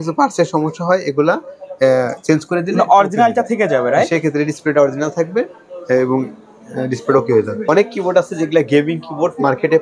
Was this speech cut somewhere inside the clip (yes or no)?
no